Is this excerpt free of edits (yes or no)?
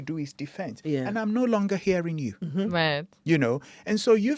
yes